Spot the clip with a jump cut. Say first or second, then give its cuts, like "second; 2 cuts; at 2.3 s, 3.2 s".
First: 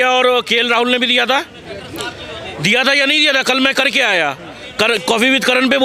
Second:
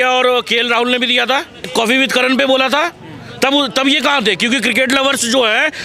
second; 1 cut; at 1.7 s